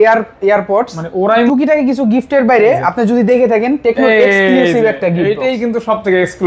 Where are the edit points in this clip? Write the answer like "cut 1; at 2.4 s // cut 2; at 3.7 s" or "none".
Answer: cut 1; at 1.5 s